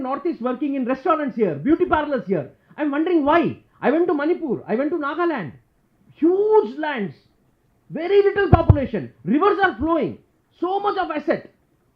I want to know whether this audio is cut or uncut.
uncut